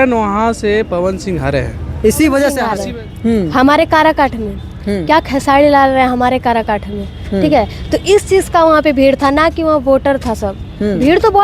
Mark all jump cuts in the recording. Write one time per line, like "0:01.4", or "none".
0:02.7